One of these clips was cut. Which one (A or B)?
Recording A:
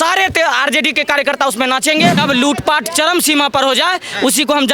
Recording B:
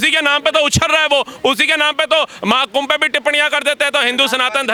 A